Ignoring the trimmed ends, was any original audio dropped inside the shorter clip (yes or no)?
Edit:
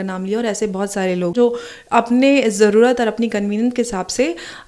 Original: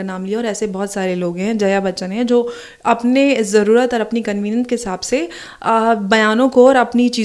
yes